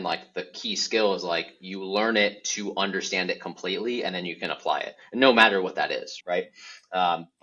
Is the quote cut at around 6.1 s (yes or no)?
yes